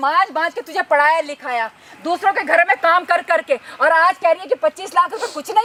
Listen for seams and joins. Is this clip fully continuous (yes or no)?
yes